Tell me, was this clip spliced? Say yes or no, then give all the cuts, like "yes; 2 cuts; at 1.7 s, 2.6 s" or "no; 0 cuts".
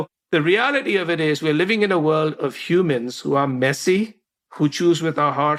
no; 0 cuts